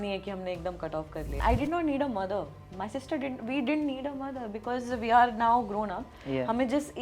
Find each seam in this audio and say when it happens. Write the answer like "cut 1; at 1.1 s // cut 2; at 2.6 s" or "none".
cut 1; at 1.2 s